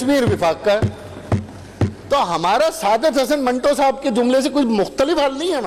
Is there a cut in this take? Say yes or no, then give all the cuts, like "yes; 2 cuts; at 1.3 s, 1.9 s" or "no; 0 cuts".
no; 0 cuts